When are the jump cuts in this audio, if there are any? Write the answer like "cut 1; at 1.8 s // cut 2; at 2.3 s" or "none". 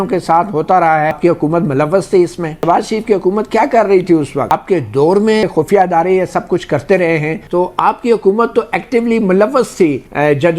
cut 1; at 1.2 s // cut 2; at 2.6 s // cut 3; at 4.5 s // cut 4; at 5.4 s // cut 5; at 7.4 s